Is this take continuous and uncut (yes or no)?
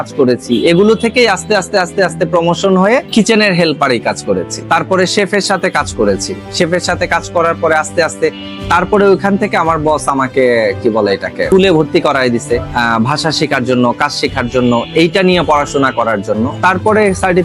yes